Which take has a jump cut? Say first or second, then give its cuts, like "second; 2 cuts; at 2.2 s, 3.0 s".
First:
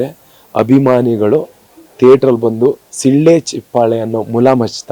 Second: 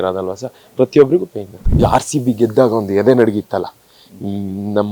second; 1 cut; at 1.8 s